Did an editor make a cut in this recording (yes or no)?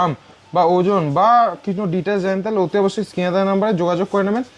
no